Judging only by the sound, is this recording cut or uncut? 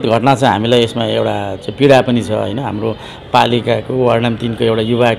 uncut